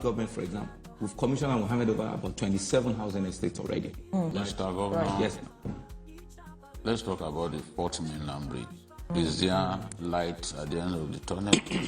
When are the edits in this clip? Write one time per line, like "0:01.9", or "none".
0:04.3